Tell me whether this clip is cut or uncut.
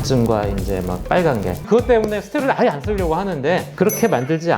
cut